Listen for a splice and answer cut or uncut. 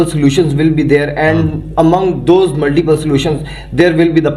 uncut